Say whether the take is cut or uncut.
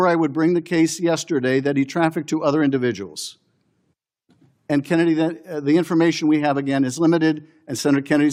uncut